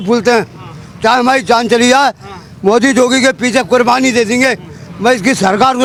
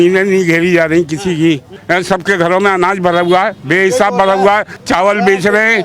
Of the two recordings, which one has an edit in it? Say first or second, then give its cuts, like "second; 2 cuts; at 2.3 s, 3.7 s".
second; 2 cuts; at 1.7 s, 4.8 s